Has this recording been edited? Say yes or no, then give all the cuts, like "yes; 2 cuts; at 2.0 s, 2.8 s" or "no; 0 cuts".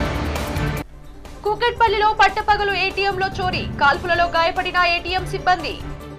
yes; 1 cut; at 0.9 s